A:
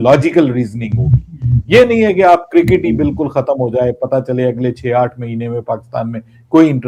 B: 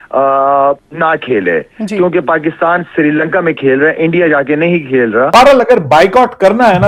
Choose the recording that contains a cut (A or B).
B